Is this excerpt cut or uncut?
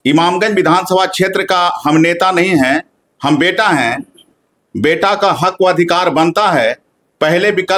uncut